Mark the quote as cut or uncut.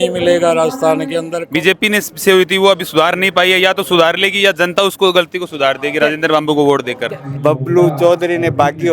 cut